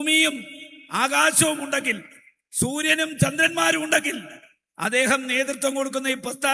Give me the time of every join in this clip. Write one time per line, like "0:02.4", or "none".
0:05.3